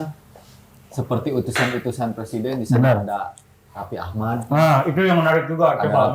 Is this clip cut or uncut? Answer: uncut